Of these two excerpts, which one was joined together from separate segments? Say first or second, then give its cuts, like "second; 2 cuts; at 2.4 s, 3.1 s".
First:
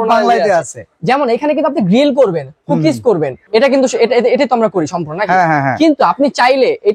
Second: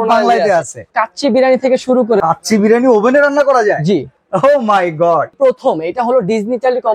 second; 3 cuts; at 0.9 s, 2.2 s, 5.3 s